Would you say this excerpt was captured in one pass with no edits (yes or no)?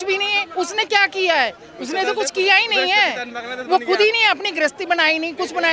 yes